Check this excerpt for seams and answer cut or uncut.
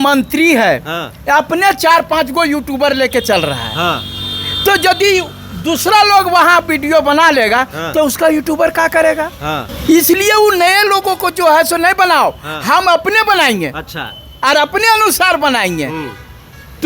uncut